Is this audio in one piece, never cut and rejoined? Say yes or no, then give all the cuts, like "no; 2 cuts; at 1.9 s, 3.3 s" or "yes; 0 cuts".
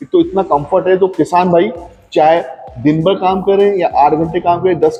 yes; 0 cuts